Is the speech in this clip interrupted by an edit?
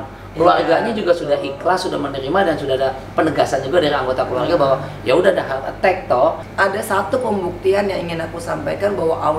yes; 1 cut; at 6.4 s

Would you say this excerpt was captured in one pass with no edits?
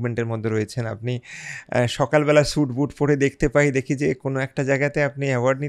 yes; 0 cuts

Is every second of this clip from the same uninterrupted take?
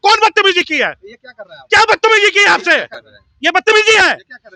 yes; 0 cuts

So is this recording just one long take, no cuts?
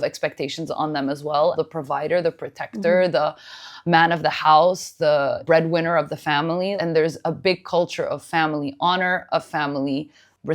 no; 3 cuts; at 1.5 s, 5.4 s, 6.7 s

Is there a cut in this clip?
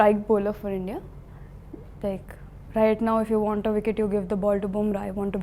no; 0 cuts

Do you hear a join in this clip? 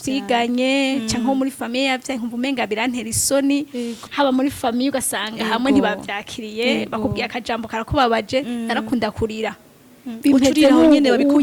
yes; 1 cut; at 4.0 s

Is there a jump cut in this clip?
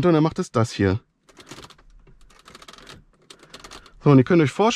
no; 0 cuts

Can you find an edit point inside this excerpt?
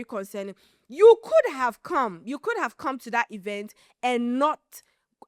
no; 0 cuts

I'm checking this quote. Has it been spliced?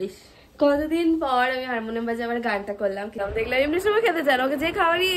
yes; 1 cut; at 3.2 s

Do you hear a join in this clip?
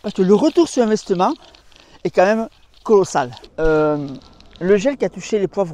yes; 1 cut; at 3.4 s

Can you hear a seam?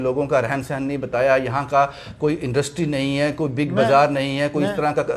no; 0 cuts

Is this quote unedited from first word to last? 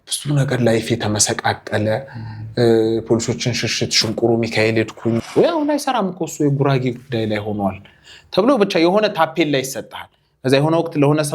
no; 1 cut; at 5.3 s

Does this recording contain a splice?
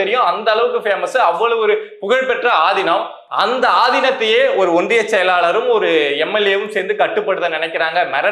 no; 0 cuts

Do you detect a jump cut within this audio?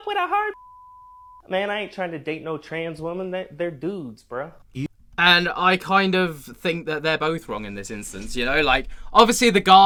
no; 0 cuts

